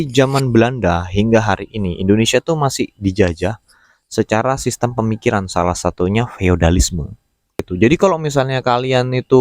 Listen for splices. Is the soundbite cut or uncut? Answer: cut